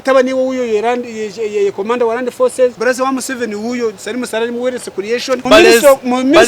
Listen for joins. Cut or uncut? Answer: cut